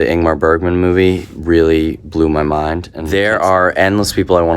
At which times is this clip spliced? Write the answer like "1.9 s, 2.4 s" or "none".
2.9 s